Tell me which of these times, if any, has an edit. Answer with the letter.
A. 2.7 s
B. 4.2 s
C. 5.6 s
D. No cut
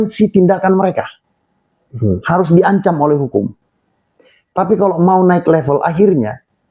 D